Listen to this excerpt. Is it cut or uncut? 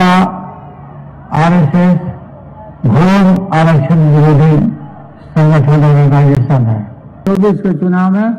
cut